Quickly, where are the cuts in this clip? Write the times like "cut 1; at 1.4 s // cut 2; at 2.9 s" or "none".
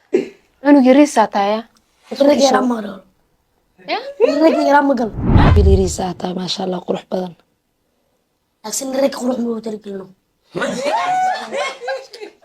cut 1; at 5.3 s